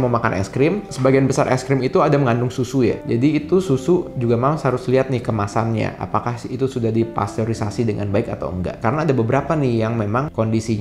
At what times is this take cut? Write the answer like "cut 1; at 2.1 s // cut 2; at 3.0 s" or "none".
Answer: none